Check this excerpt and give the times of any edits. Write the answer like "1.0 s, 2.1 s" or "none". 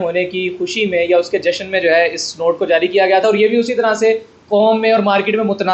none